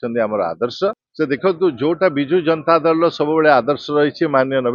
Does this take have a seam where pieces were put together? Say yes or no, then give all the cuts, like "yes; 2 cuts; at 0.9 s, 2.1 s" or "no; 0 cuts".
yes; 1 cut; at 1.0 s